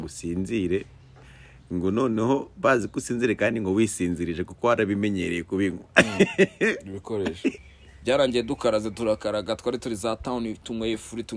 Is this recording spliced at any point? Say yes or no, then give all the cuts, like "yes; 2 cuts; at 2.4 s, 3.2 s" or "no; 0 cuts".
yes; 1 cut; at 7.6 s